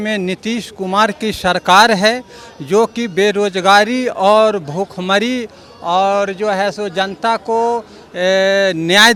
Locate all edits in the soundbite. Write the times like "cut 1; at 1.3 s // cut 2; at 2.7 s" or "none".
none